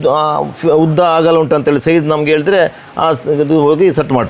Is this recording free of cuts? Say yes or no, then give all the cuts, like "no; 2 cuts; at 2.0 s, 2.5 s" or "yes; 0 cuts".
yes; 0 cuts